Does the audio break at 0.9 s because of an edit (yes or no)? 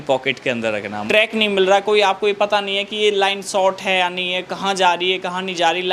yes